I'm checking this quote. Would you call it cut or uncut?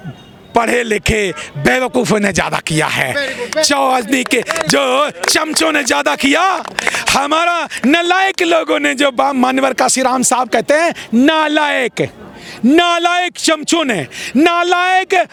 uncut